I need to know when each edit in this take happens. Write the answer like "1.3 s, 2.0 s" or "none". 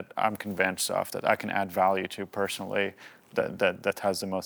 none